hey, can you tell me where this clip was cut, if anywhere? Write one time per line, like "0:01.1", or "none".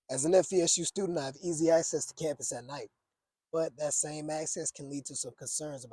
none